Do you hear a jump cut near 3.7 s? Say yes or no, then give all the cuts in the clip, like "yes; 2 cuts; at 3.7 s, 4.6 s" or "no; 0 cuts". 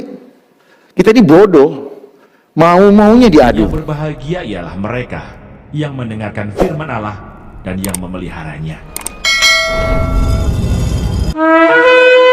yes; 1 cut; at 3.7 s